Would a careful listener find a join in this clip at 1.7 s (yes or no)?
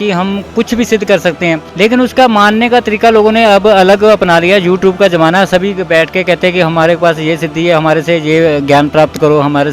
yes